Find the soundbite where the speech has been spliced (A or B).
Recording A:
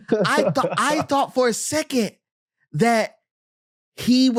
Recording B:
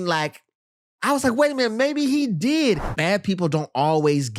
B